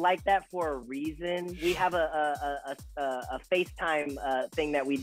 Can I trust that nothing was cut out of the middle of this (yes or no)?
no